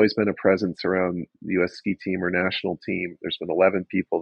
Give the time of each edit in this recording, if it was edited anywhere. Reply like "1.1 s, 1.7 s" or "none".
none